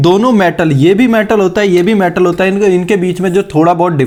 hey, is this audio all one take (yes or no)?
yes